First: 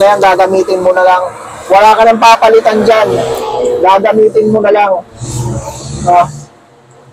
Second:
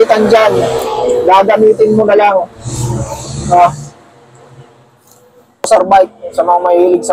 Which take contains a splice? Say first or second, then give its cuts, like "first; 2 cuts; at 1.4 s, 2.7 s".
second; 1 cut; at 5.7 s